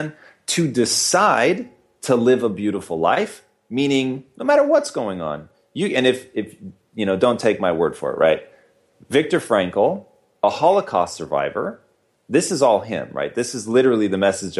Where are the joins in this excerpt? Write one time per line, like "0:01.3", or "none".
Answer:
none